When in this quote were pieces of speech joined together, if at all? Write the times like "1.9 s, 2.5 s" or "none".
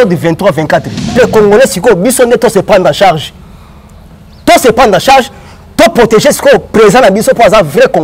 1.1 s